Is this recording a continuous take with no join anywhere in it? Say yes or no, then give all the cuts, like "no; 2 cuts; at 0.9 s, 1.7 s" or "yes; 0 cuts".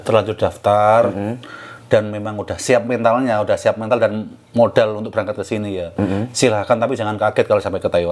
yes; 0 cuts